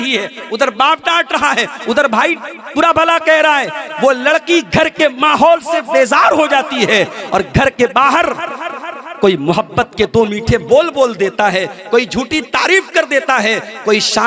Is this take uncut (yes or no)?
yes